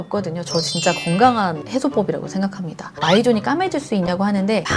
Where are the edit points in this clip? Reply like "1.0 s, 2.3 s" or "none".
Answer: 2.9 s